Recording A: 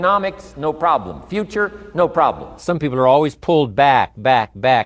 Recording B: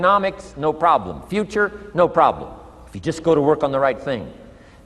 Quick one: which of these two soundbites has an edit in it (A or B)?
A